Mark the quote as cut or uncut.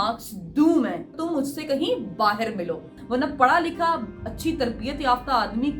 cut